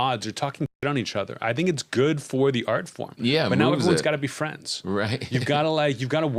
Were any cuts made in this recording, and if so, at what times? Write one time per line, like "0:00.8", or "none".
none

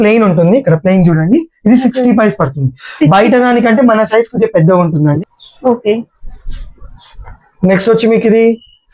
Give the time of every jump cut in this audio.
0:05.2

